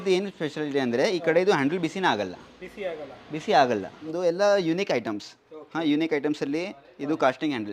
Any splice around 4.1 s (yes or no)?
yes